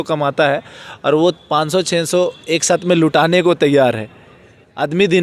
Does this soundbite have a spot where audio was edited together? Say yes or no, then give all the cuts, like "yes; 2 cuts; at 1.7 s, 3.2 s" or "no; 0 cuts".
no; 0 cuts